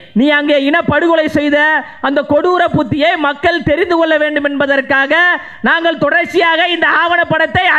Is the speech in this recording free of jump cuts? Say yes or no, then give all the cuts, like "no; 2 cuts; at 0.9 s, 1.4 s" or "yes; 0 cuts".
yes; 0 cuts